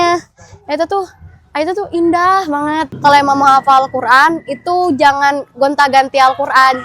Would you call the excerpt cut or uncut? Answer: cut